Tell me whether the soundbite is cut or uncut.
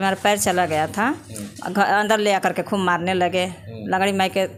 uncut